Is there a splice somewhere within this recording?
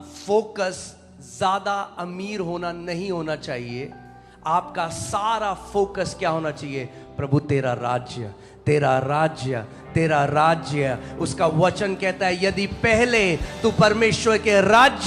no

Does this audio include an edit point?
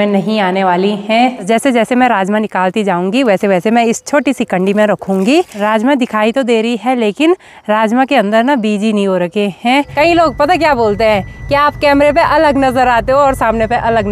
yes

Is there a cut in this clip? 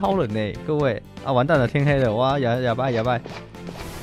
yes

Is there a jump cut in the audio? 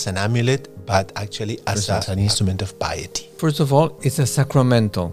yes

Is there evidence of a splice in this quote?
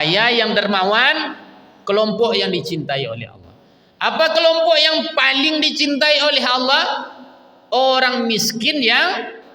no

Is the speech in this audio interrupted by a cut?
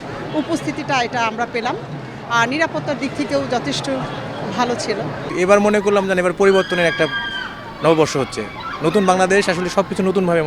yes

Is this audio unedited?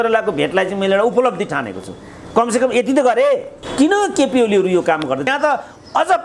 no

